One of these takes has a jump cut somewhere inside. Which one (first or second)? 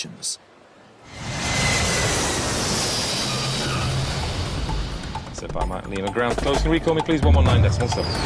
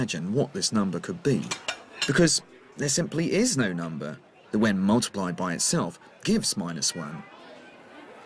second